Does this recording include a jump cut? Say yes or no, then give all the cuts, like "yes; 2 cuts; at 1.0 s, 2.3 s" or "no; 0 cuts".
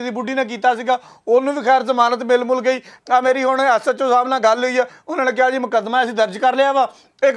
yes; 1 cut; at 2.9 s